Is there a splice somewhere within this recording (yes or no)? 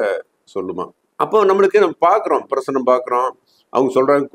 yes